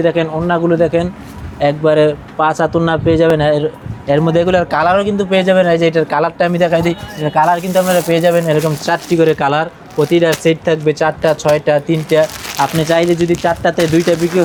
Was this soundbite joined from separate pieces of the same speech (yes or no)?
no